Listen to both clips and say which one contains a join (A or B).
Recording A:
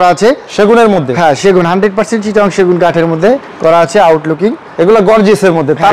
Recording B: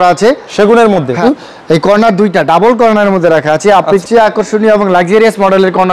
B